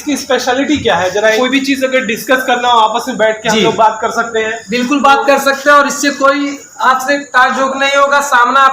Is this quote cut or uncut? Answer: cut